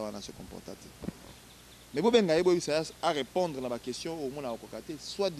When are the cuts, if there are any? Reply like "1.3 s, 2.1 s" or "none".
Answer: 1.3 s